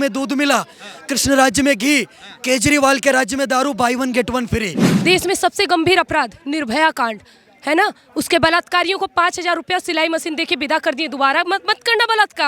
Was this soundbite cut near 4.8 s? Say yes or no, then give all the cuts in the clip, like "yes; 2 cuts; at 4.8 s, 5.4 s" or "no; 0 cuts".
yes; 1 cut; at 4.8 s